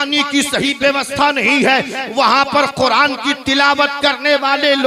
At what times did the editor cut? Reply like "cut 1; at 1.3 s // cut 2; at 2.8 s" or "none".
none